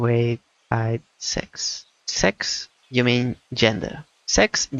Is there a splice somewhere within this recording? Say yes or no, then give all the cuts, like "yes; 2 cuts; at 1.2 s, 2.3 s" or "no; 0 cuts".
no; 0 cuts